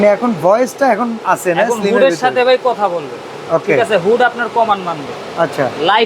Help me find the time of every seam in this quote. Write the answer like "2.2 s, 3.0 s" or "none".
none